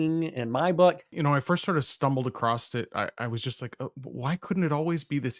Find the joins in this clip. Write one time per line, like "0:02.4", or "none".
0:01.1